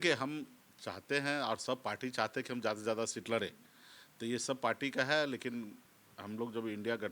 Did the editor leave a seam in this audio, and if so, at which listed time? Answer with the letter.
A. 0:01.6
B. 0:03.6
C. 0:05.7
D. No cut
D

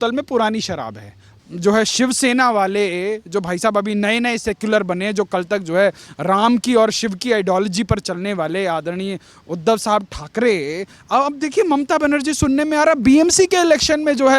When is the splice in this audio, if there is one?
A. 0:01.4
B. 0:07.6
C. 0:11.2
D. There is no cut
A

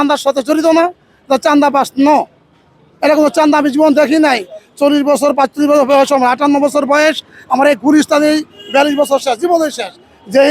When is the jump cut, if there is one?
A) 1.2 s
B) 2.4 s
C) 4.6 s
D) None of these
D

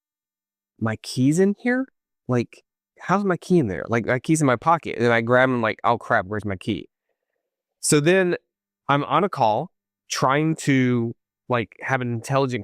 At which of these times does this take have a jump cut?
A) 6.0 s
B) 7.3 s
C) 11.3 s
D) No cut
D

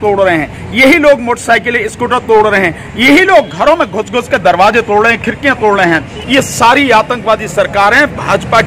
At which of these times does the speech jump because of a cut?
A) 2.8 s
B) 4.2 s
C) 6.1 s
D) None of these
C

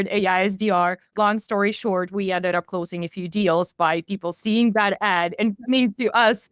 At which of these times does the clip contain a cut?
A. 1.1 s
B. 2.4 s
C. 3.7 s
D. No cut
A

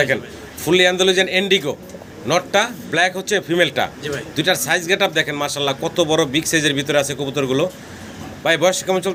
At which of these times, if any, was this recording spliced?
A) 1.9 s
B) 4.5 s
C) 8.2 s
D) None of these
D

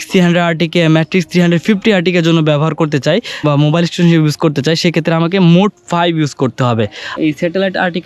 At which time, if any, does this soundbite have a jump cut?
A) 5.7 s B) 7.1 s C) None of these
B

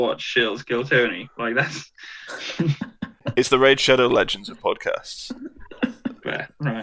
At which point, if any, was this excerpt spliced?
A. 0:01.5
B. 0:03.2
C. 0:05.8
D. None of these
B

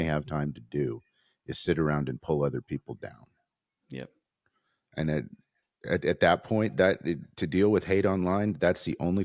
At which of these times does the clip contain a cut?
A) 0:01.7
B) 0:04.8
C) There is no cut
C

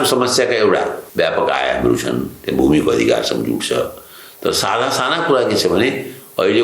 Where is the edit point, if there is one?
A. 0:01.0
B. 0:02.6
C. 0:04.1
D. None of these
A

